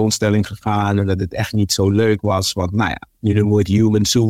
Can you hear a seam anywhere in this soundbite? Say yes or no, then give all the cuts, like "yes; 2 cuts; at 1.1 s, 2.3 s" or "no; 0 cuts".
yes; 1 cut; at 3.1 s